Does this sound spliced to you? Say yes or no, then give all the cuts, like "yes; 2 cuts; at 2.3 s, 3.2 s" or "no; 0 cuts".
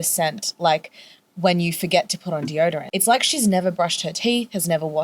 yes; 1 cut; at 2.9 s